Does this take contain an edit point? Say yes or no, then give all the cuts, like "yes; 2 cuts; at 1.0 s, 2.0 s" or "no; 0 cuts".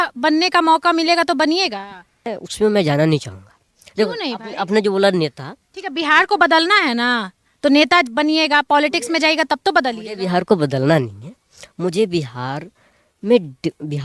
yes; 1 cut; at 2.3 s